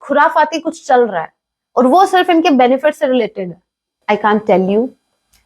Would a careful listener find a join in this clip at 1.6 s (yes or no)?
no